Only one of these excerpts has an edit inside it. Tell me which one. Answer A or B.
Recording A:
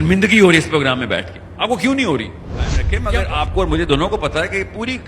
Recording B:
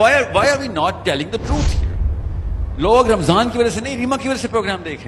A